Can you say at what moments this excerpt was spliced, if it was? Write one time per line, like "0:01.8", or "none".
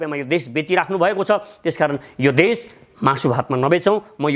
none